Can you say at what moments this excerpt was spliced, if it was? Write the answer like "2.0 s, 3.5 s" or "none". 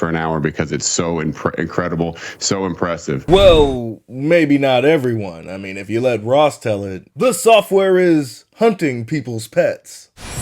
none

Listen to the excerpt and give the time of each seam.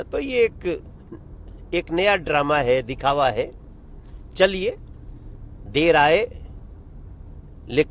none

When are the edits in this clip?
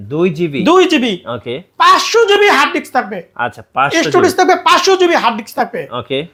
none

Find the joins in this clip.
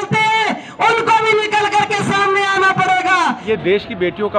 3.4 s

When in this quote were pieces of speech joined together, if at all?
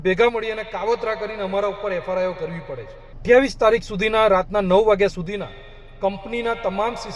3.1 s

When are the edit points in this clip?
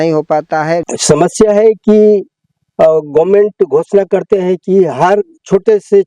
0.9 s

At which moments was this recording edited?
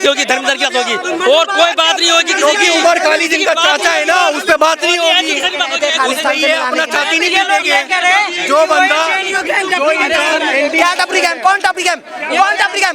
none

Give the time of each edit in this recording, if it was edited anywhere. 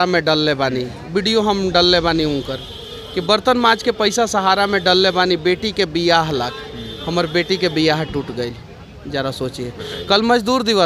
none

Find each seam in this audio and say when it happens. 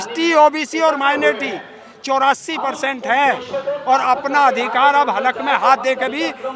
none

